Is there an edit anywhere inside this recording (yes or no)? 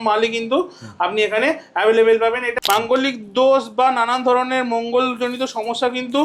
yes